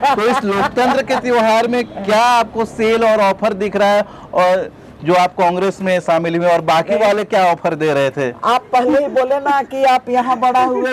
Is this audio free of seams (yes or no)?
yes